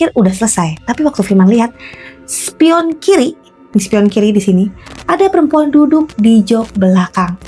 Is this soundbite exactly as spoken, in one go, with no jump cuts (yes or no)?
yes